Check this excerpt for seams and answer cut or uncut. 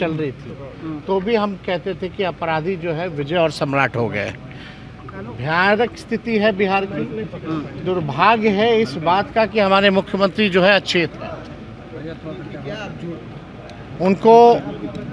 uncut